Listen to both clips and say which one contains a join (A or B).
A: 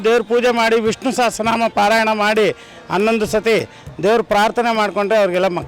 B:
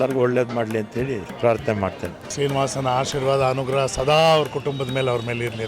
B